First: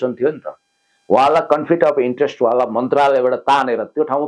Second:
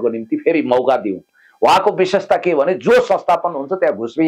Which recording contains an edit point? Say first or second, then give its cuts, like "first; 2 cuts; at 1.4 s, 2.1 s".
second; 1 cut; at 1.2 s